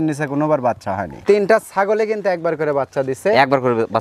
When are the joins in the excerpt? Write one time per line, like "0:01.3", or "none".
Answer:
0:01.1